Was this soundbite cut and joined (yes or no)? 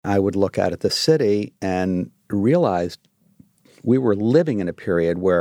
no